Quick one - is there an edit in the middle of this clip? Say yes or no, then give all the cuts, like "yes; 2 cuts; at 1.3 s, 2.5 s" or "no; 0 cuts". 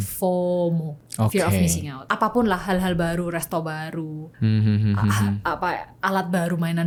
no; 0 cuts